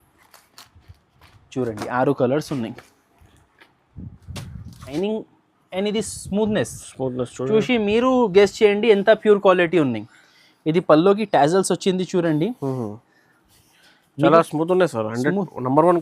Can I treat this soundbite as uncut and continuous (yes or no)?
no